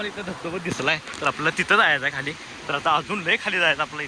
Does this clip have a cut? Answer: no; 0 cuts

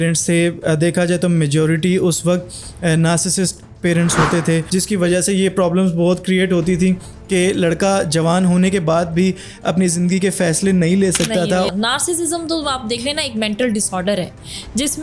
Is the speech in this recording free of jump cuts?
no; 2 cuts; at 4.7 s, 11.7 s

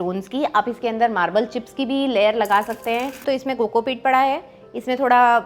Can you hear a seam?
yes; 1 cut; at 3.2 s

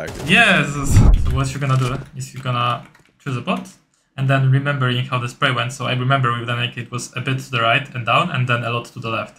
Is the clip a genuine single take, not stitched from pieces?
no; 1 cut; at 1.0 s

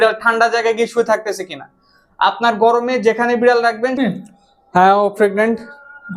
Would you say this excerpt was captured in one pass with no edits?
no; 1 cut; at 4.0 s

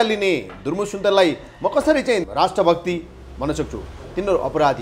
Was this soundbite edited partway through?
yes; 1 cut; at 2.3 s

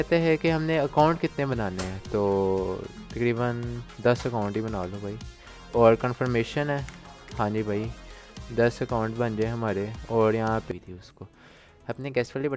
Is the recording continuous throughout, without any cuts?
no; 1 cut; at 10.7 s

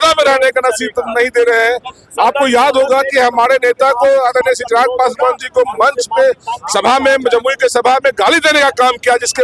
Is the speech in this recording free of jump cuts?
yes; 0 cuts

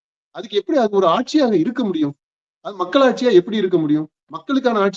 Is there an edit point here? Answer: no; 0 cuts

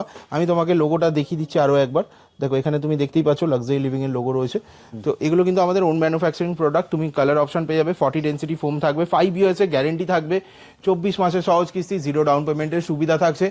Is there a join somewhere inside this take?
no; 0 cuts

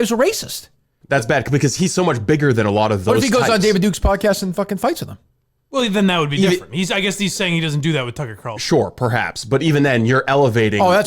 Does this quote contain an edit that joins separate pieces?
yes; 1 cut; at 0.9 s

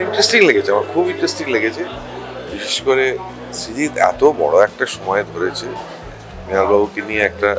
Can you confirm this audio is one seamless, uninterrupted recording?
yes; 0 cuts

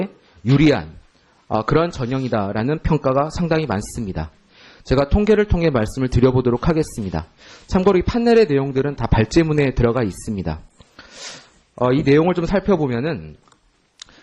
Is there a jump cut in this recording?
yes; 1 cut; at 2.0 s

